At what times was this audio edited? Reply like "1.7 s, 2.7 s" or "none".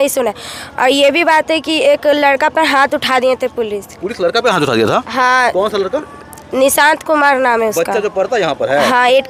none